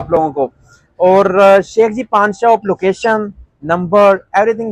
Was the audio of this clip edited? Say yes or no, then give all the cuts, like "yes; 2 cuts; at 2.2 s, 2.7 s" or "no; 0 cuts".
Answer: no; 0 cuts